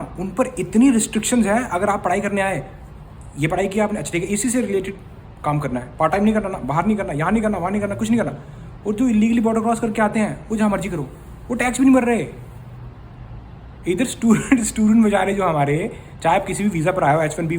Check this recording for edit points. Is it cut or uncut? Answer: uncut